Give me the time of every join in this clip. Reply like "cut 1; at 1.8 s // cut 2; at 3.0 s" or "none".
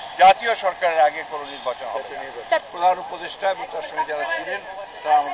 cut 1; at 2.6 s